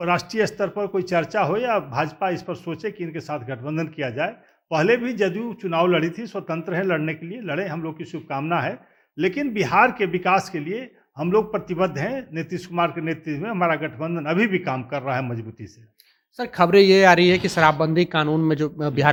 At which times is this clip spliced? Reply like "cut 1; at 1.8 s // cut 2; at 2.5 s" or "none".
none